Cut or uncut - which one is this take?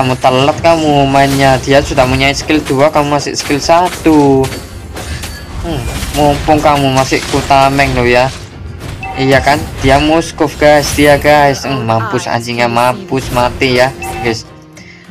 cut